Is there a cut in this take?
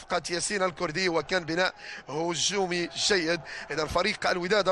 no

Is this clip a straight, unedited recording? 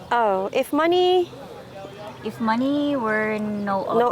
yes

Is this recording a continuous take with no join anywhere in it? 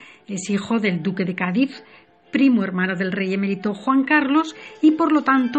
no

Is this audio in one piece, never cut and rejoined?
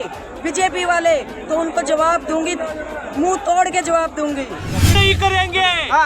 no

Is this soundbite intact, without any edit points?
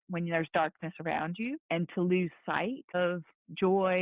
no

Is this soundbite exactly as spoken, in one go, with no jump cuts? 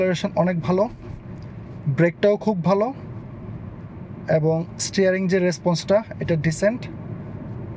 yes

